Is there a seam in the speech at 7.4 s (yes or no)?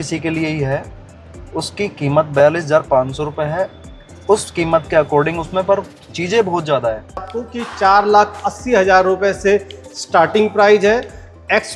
yes